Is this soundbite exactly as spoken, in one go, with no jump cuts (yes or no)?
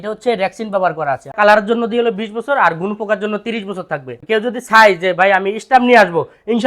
no